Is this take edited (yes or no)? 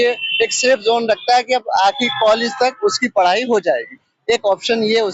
no